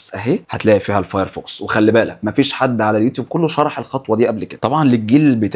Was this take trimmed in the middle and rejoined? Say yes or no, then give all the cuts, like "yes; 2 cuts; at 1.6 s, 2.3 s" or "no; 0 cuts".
yes; 1 cut; at 4.5 s